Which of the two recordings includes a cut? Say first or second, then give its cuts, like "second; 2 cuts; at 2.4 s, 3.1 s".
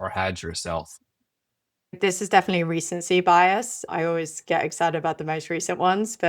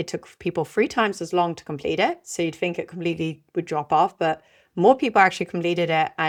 first; 2 cuts; at 2.0 s, 3.8 s